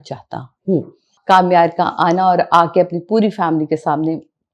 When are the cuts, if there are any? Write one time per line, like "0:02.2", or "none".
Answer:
0:01.1